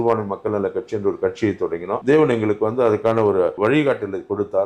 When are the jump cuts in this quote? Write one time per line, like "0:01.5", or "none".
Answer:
0:02.0
0:03.6